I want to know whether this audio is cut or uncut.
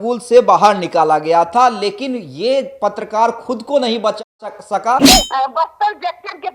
cut